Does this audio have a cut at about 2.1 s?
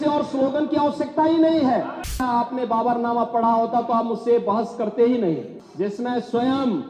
yes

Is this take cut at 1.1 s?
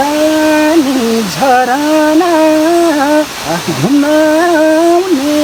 no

